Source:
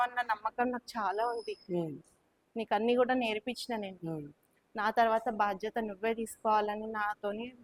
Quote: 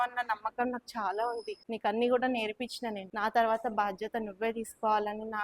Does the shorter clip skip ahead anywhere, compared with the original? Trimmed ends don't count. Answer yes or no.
yes